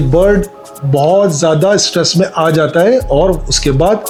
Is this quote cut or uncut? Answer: uncut